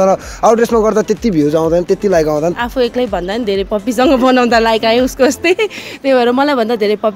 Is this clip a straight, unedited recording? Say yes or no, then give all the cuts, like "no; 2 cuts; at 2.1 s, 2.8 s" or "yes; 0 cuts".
no; 1 cut; at 2.5 s